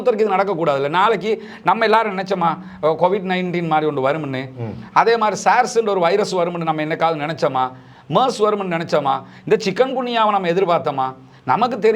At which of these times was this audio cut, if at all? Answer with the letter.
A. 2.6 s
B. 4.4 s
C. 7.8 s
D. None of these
D